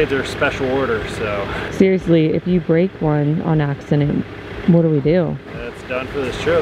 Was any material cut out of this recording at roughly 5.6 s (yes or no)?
yes